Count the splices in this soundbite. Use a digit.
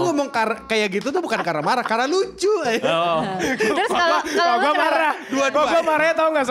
0